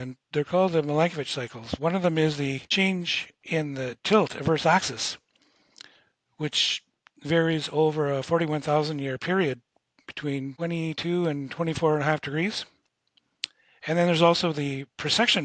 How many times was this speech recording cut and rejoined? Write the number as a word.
two